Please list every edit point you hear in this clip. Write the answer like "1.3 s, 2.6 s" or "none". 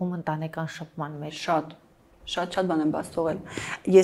none

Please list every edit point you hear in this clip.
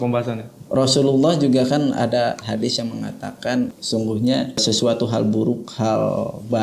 3.7 s, 4.6 s

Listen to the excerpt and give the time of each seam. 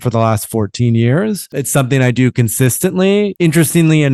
1.5 s, 3.3 s

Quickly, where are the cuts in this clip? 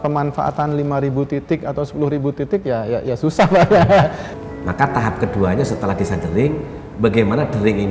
4.3 s

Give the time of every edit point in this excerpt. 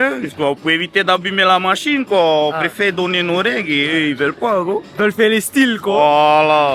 none

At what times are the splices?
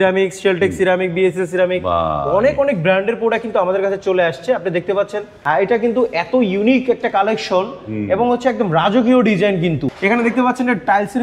5.3 s, 9.8 s

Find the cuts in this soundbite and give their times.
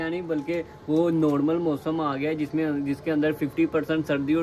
none

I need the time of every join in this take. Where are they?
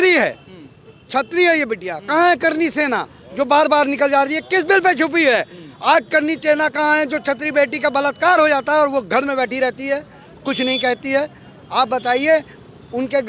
none

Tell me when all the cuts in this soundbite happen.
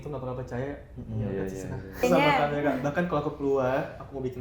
2.0 s

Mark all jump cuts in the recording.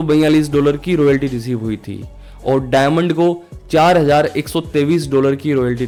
none

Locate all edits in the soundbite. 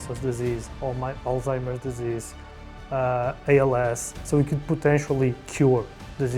4.1 s

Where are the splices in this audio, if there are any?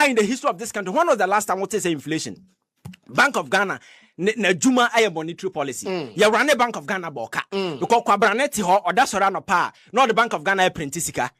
none

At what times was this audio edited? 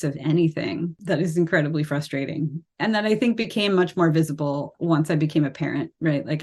1.0 s, 2.7 s, 4.7 s

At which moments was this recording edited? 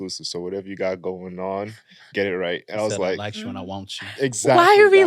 none

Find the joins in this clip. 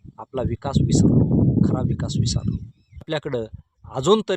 3.1 s

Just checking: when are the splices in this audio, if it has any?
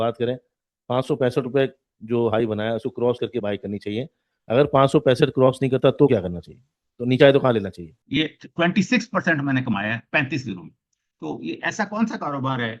7.9 s

